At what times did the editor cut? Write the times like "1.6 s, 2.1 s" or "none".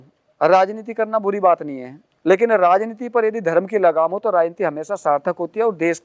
none